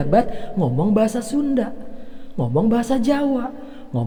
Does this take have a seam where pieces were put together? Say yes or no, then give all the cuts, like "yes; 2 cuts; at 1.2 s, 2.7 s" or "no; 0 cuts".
no; 0 cuts